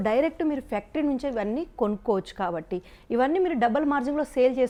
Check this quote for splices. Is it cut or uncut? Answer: uncut